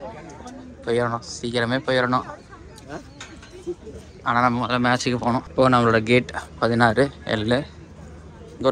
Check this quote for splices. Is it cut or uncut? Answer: cut